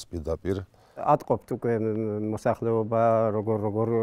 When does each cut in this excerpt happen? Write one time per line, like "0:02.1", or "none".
0:01.0